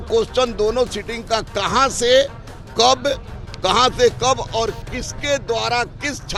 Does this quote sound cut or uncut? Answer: uncut